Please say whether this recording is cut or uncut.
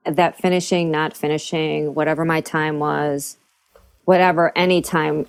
uncut